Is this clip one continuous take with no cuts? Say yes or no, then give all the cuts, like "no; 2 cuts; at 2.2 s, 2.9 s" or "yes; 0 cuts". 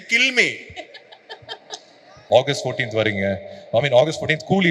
no; 1 cut; at 2.1 s